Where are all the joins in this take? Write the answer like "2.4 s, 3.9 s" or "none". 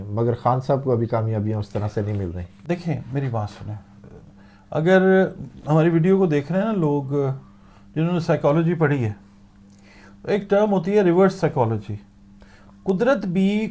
none